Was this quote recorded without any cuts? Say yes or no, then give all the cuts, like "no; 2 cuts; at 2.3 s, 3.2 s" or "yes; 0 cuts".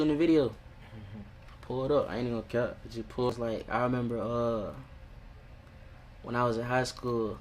no; 1 cut; at 3.3 s